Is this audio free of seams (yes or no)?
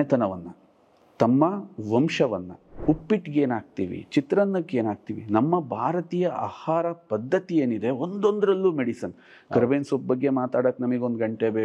no